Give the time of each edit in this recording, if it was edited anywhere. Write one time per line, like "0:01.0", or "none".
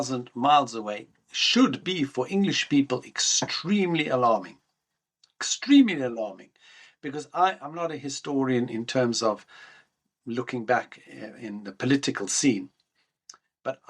none